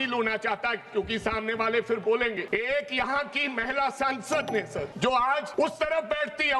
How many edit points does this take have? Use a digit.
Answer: 3